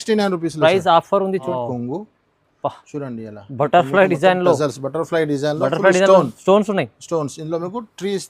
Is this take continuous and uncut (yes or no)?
no